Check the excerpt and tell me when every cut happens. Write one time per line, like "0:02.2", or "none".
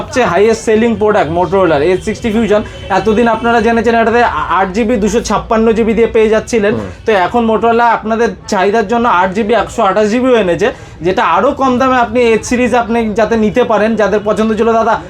none